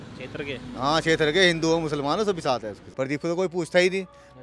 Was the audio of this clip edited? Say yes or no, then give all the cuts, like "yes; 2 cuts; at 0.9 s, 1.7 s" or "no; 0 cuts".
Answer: yes; 1 cut; at 2.8 s